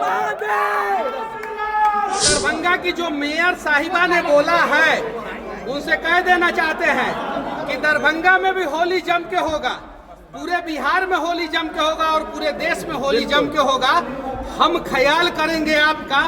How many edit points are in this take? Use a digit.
1